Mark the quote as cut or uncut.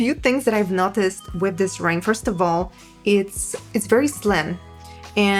uncut